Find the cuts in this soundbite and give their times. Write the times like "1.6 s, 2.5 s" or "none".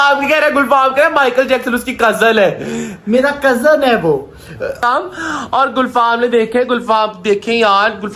4.8 s